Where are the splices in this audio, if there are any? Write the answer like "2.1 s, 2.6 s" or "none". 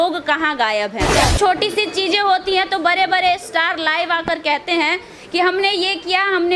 1.3 s